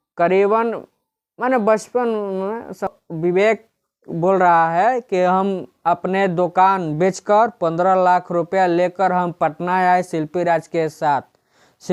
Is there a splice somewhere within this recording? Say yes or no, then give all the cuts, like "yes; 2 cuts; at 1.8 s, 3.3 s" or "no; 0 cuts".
yes; 1 cut; at 2.9 s